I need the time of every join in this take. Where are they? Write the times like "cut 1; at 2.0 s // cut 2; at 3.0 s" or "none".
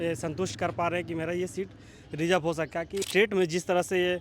cut 1; at 3.0 s